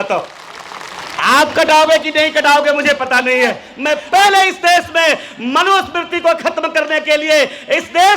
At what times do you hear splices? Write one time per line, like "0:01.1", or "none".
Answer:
0:03.7